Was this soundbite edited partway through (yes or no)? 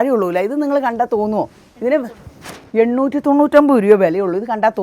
no